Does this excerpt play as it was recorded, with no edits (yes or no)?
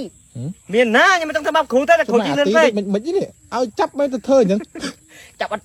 yes